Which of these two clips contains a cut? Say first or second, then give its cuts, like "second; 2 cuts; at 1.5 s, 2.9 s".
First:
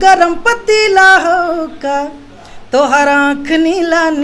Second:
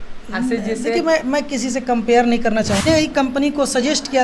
second; 1 cut; at 2.8 s